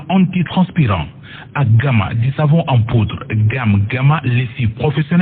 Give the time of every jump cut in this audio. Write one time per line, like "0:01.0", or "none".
0:01.2